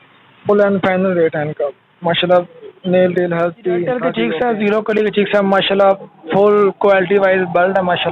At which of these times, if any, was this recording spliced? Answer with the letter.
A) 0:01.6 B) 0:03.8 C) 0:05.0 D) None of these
B